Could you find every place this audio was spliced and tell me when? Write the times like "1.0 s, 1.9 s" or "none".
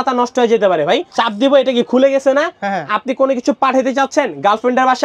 1.1 s